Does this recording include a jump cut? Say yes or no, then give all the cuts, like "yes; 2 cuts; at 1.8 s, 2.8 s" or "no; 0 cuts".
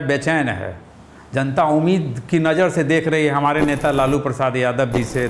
no; 0 cuts